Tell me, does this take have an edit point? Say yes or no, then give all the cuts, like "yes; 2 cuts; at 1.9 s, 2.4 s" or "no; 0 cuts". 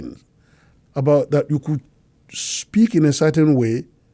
no; 0 cuts